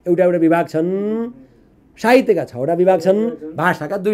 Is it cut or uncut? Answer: uncut